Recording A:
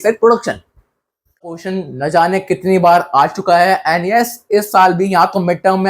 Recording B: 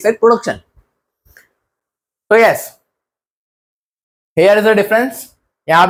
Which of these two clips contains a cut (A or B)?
A